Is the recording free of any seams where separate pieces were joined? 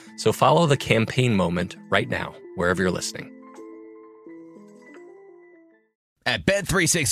no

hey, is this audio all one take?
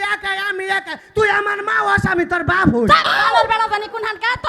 yes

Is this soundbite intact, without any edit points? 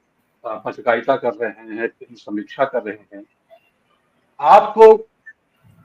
yes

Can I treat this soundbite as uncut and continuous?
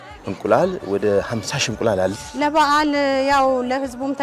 no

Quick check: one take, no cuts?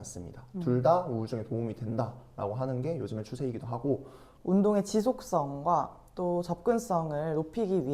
no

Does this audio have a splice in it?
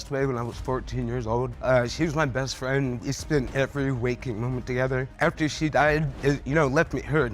yes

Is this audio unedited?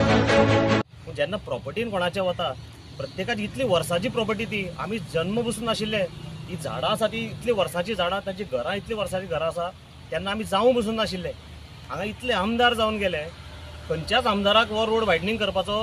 no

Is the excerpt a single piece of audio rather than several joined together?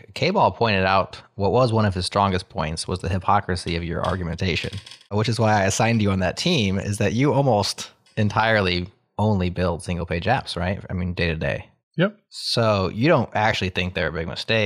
yes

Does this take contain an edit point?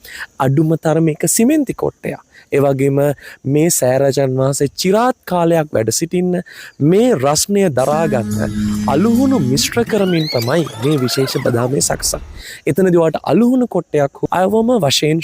yes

